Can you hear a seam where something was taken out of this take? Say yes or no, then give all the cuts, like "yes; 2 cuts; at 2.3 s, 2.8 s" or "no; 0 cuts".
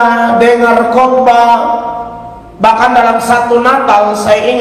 no; 0 cuts